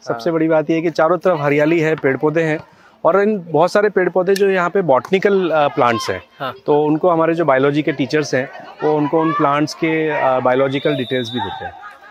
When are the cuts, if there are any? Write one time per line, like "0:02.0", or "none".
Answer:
none